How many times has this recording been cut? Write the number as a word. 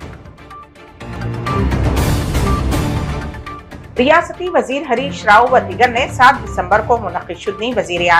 one